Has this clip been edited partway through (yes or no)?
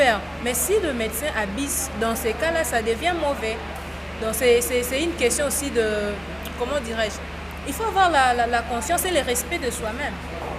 no